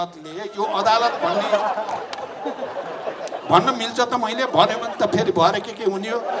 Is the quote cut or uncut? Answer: uncut